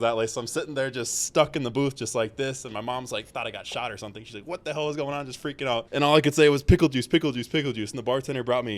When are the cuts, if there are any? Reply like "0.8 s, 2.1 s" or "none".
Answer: 5.9 s